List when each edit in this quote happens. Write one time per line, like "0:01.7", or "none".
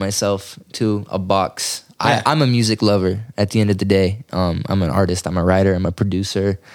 none